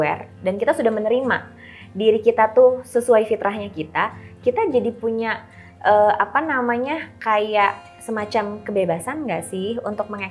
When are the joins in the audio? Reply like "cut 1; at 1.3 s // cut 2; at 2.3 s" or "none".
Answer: none